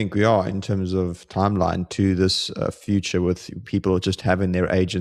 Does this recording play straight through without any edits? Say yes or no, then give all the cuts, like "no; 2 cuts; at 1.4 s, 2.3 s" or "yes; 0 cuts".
yes; 0 cuts